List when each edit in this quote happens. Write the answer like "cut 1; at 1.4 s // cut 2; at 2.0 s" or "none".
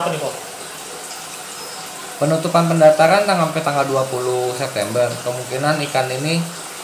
none